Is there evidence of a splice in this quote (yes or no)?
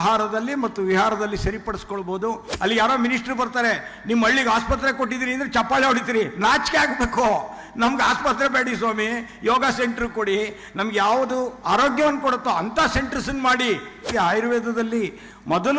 yes